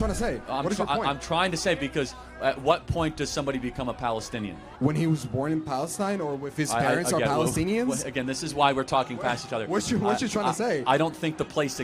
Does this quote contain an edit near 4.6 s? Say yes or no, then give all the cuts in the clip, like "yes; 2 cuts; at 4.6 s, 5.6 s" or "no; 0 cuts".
yes; 1 cut; at 4.6 s